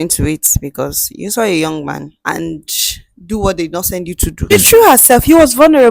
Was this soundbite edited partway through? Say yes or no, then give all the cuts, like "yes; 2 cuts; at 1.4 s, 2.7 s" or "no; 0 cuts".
yes; 2 cuts; at 2.1 s, 4.5 s